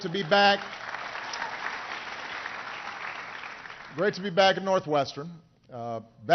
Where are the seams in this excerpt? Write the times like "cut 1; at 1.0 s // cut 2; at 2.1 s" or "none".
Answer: cut 1; at 4.1 s